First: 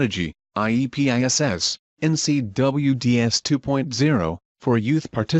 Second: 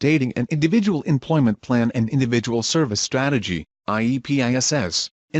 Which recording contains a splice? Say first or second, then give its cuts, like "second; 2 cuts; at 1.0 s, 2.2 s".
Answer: first; 2 cuts; at 3.9 s, 4.6 s